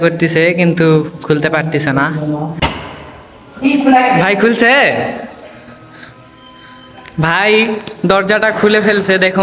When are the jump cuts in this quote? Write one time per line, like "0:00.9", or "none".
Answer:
0:02.6

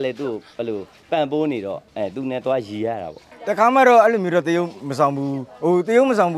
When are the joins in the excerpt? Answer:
0:03.3

